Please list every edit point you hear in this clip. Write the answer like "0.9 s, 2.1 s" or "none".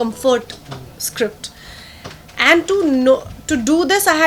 none